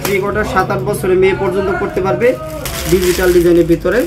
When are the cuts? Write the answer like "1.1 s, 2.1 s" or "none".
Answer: 2.6 s